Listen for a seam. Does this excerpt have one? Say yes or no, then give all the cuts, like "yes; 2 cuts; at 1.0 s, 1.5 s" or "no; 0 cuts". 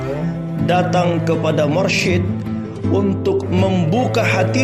no; 0 cuts